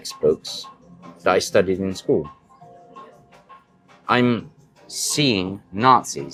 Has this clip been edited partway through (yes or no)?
no